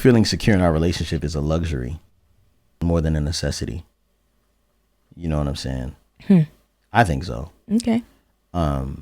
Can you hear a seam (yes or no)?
yes